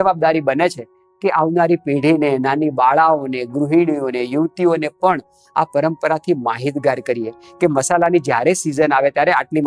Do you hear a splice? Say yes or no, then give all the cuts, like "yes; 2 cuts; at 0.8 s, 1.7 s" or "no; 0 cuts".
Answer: no; 0 cuts